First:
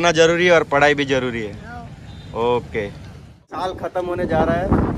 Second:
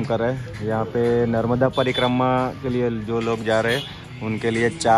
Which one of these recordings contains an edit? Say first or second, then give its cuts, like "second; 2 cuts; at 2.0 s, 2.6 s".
first; 1 cut; at 3.7 s